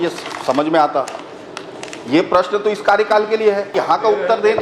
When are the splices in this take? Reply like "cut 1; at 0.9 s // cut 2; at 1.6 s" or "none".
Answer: cut 1; at 3.7 s